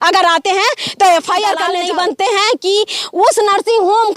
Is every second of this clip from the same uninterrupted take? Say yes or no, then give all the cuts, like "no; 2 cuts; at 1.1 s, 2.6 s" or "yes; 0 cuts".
no; 1 cut; at 1.7 s